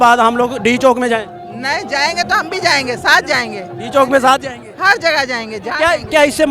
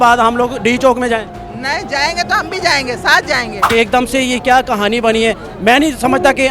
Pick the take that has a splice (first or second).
second